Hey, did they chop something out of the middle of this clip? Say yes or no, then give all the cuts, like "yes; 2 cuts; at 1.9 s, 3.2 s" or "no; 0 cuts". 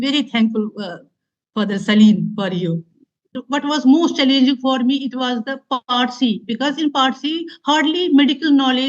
yes; 1 cut; at 3.4 s